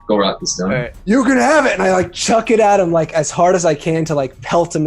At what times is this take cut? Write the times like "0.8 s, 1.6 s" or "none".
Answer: 0.9 s